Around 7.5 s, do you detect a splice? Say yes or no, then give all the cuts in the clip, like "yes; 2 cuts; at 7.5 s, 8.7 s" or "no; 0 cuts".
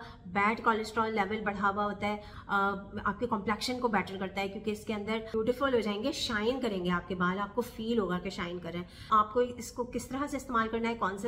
no; 3 cuts; at 2.3 s, 5.3 s, 9.1 s